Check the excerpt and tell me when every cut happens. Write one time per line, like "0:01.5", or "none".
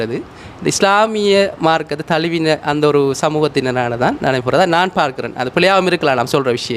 none

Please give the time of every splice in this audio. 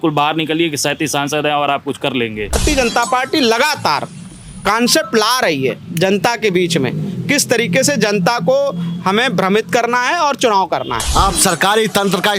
0:02.6
0:11.0

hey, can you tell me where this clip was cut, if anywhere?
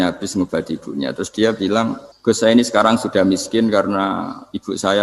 0:02.1

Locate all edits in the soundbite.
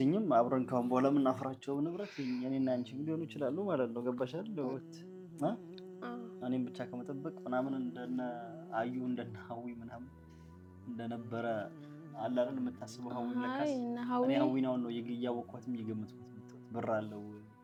none

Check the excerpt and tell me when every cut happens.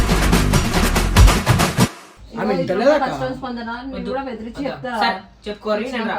0:02.1

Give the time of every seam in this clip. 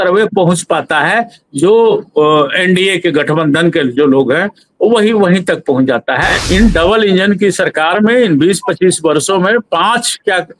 0:06.3

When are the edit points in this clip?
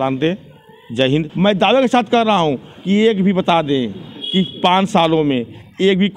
0:01.3

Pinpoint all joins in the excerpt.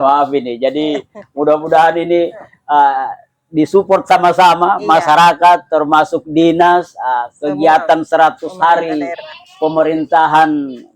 none

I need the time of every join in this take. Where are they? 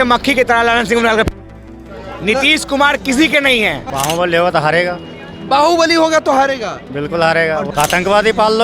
0:03.8
0:07.7

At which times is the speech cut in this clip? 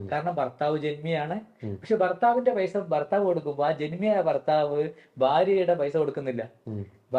none

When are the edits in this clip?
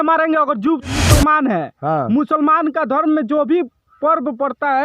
0:01.0

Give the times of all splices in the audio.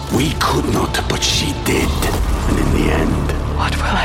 none

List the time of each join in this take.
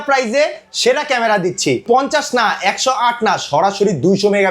0:01.8

